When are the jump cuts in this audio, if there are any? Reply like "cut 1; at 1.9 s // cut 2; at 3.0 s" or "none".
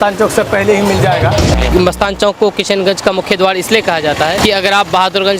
cut 1; at 1.5 s // cut 2; at 4.4 s